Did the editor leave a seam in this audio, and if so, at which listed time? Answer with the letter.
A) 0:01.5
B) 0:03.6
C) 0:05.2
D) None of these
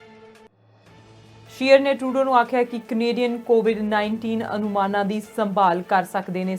A